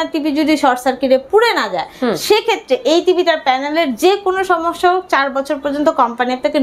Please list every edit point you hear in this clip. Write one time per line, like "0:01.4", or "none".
none